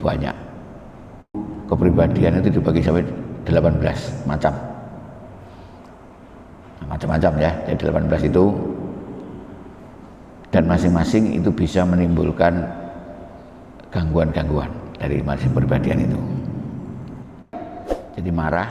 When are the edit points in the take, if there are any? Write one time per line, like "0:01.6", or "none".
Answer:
0:01.5
0:17.5

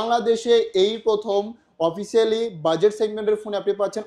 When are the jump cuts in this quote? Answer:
none

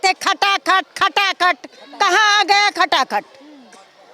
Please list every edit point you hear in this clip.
none

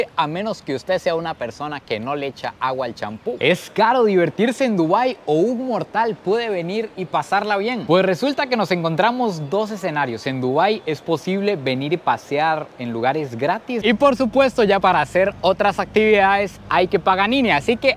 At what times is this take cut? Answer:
0:03.4
0:13.8
0:14.8

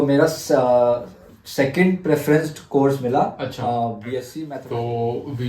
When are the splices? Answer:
0:04.3

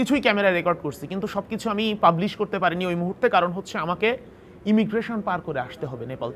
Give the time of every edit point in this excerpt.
none

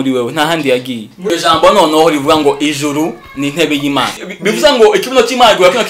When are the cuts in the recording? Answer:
0:01.2
0:04.3

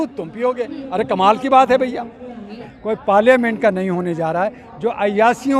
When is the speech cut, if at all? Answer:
0:02.6
0:03.9

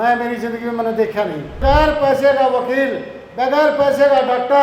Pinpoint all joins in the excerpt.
0:01.6

